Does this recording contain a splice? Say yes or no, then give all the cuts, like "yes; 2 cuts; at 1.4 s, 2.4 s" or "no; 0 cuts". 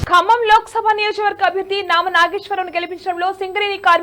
no; 0 cuts